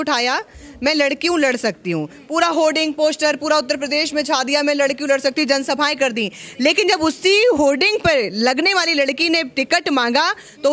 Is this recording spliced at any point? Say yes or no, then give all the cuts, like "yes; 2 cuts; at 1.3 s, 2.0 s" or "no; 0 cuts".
no; 0 cuts